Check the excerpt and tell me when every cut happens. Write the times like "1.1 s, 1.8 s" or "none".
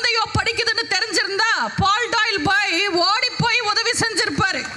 none